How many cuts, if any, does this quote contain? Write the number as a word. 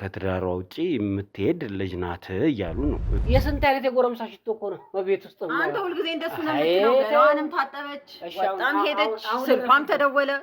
one